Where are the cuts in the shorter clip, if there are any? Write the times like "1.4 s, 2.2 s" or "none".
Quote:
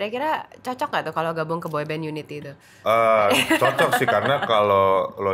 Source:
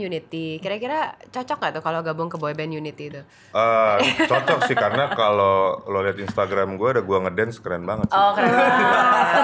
none

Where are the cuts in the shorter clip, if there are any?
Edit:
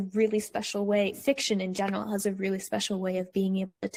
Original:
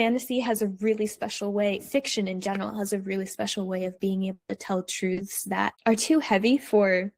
none

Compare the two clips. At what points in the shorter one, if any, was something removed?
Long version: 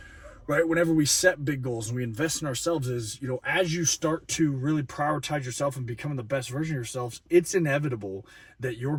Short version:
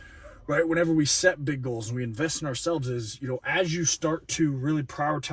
none

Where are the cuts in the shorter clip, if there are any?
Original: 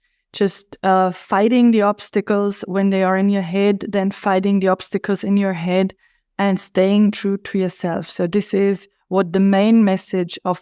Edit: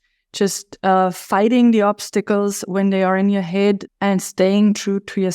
3.8 s

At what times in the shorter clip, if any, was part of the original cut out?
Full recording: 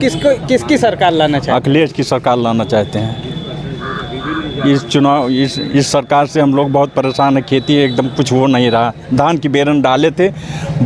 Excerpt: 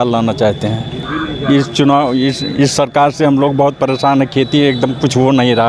1.0 s

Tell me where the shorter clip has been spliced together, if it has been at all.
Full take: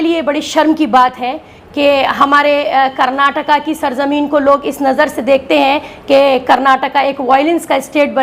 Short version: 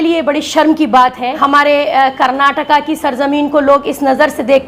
1.4 s

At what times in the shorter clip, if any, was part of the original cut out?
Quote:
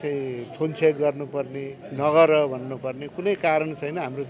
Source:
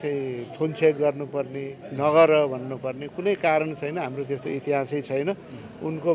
none

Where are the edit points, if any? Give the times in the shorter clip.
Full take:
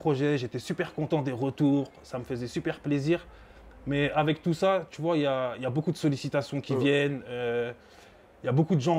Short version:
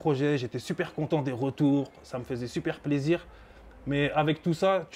none

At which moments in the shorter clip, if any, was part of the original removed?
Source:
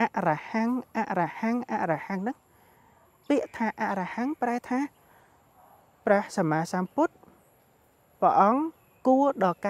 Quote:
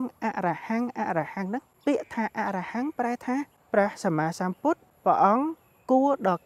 1.7 s, 3.6 s, 4.9 s

